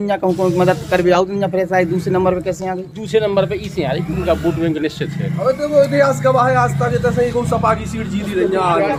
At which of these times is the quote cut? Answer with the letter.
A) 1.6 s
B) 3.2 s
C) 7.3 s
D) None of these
D